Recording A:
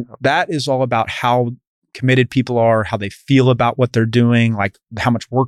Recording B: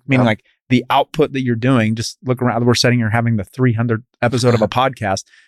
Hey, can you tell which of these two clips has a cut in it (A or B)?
B